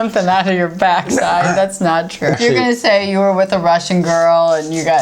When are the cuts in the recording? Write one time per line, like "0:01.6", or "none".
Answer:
0:02.4